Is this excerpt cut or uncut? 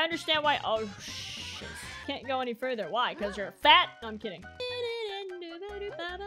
cut